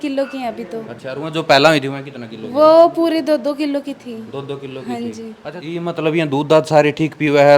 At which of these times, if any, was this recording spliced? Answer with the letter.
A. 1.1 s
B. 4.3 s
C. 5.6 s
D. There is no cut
C